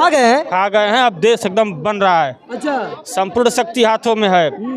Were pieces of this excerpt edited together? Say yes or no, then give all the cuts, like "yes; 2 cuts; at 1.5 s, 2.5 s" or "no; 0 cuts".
no; 0 cuts